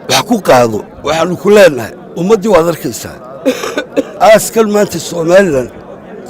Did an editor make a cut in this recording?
yes; 2 cuts; at 0.9 s, 4.1 s

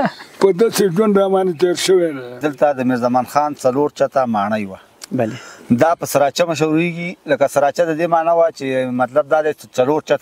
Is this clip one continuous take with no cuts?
no; 1 cut; at 2.3 s

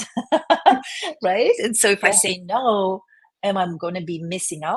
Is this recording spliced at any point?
no; 0 cuts

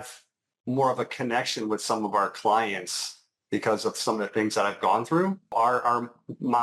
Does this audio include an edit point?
yes; 1 cut; at 5.5 s

